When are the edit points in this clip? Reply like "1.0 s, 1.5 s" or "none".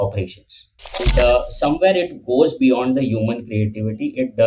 1.0 s